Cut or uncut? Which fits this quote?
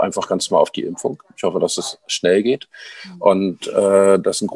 uncut